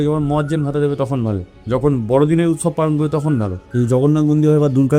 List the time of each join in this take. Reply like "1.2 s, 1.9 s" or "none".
1.5 s, 3.6 s